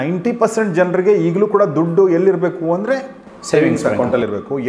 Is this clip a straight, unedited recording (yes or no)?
yes